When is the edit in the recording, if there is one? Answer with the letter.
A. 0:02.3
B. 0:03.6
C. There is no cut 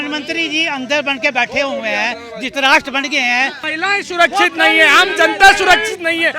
B